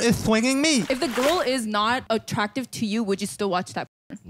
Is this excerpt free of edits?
no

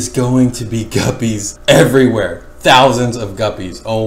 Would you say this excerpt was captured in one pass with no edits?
yes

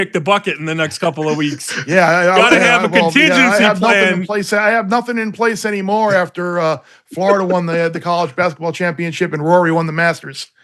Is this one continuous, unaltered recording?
yes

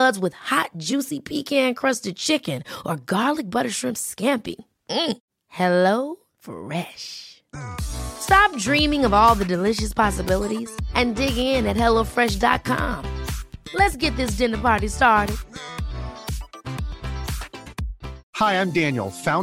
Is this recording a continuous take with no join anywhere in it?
yes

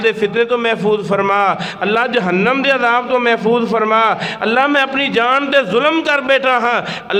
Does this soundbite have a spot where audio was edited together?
no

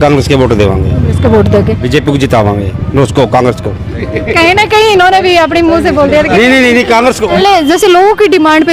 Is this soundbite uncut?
no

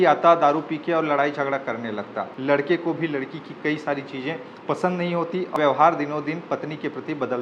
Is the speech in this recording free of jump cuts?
no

